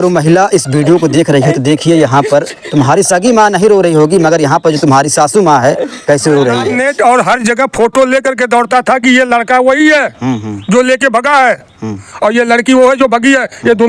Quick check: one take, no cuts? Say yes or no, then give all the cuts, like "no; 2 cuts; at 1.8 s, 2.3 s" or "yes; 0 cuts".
no; 1 cut; at 6.7 s